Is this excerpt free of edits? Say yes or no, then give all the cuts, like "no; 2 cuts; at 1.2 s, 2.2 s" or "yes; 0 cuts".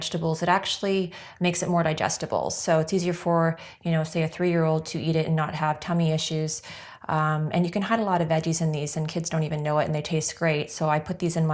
yes; 0 cuts